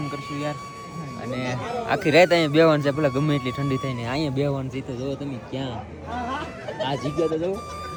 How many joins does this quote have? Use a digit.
0